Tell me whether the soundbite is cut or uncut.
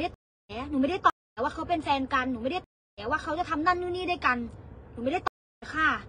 uncut